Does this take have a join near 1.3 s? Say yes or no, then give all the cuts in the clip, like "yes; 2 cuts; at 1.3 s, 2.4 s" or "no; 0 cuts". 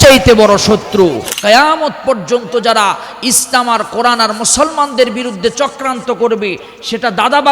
yes; 1 cut; at 1.3 s